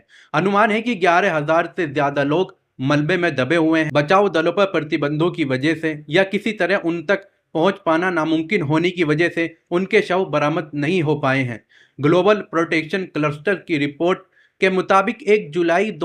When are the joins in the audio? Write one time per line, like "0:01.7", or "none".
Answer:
none